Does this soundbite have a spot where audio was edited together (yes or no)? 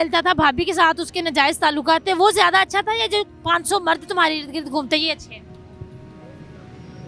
no